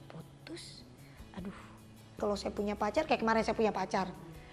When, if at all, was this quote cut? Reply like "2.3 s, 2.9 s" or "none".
2.2 s